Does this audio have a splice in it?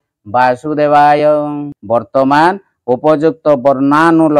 yes; 1 cut; at 1.7 s

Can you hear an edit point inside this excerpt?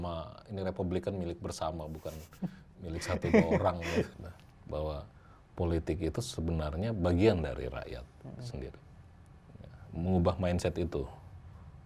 yes; 1 cut; at 4.1 s

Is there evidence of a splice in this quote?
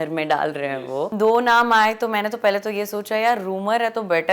yes; 1 cut; at 1.1 s

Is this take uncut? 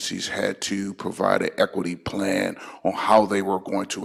yes; 0 cuts

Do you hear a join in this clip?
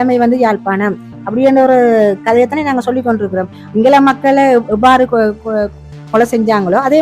yes; 1 cut; at 3.6 s

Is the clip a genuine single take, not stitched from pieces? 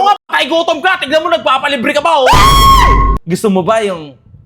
no; 1 cut; at 3.2 s

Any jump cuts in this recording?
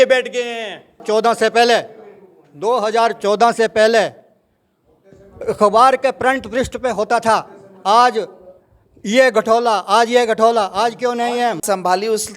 yes; 2 cuts; at 1.0 s, 11.6 s

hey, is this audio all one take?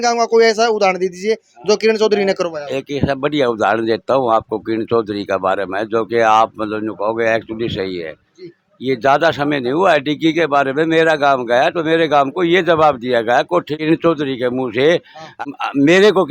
no; 2 cuts; at 13.7 s, 15.3 s

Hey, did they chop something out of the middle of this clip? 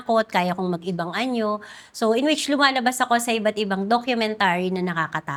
no; 0 cuts

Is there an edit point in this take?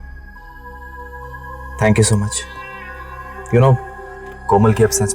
no; 0 cuts

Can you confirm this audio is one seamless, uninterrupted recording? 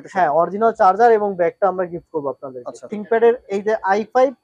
no; 1 cut; at 3.0 s

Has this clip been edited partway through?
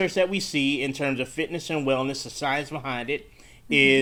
no; 0 cuts

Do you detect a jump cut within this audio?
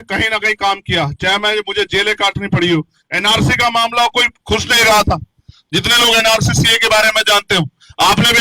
no; 0 cuts

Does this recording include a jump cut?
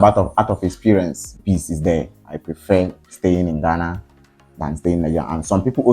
yes; 2 cuts; at 1.4 s, 2.3 s

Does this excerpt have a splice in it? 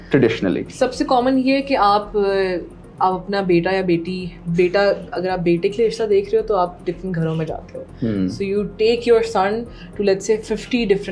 no; 0 cuts

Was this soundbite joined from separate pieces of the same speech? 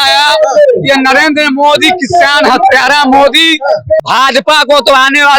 yes; 1 cut; at 4.0 s

